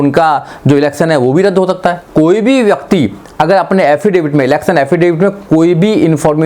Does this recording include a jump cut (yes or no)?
yes